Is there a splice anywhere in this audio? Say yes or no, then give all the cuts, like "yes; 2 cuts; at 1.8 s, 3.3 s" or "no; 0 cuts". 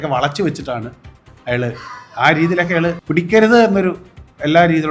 yes; 1 cut; at 3.0 s